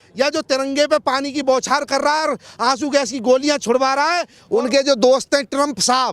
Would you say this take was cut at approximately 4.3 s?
yes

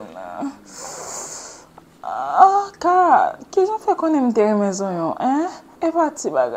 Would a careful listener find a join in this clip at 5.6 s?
yes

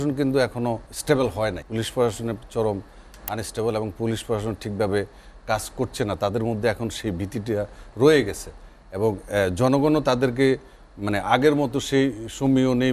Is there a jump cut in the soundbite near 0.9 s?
yes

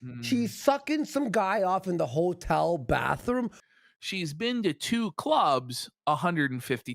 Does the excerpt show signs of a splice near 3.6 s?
yes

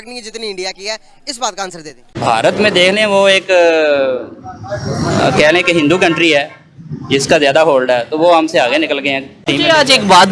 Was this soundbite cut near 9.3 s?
yes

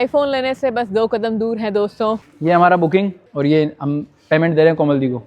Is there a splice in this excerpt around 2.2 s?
yes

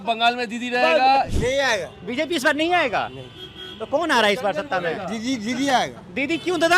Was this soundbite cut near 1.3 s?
yes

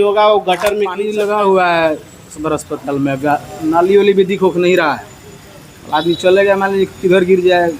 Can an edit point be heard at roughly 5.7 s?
no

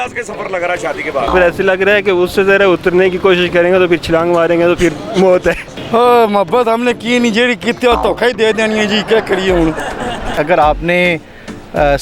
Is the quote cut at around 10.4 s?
yes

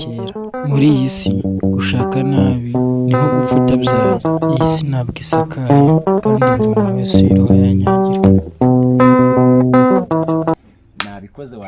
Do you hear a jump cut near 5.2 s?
no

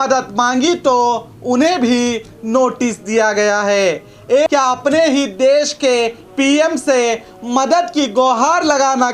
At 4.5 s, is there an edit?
yes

